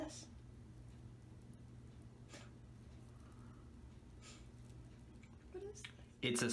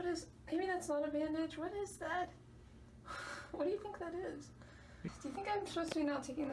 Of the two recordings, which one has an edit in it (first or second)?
second